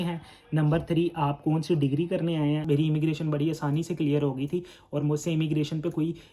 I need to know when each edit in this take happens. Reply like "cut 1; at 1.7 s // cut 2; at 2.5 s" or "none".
cut 1; at 2.6 s

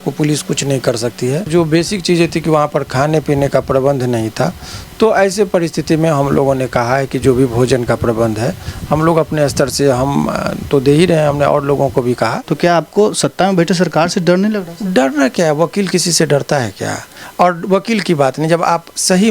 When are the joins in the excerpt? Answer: cut 1; at 1.5 s // cut 2; at 12.4 s

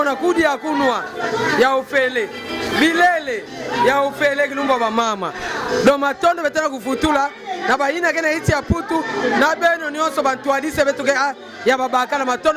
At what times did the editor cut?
none

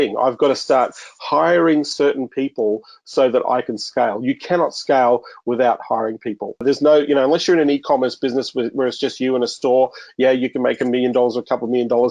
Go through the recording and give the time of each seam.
cut 1; at 6.6 s

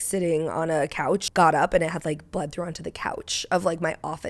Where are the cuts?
cut 1; at 1.3 s

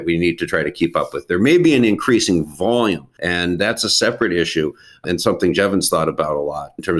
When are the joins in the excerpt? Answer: none

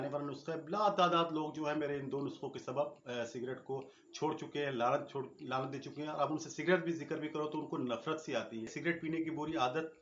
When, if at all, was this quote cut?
cut 1; at 8.7 s

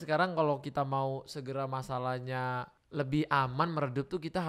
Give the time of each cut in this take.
cut 1; at 2.8 s

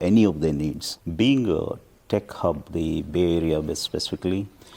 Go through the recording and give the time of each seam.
cut 1; at 1.0 s

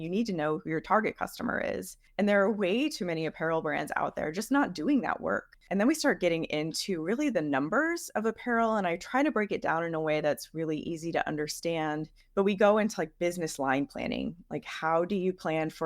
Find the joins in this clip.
cut 1; at 2.0 s // cut 2; at 5.5 s // cut 3; at 12.2 s

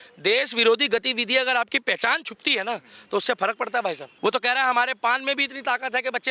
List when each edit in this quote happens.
cut 1; at 4.1 s

